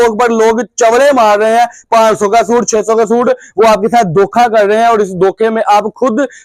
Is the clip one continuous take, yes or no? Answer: yes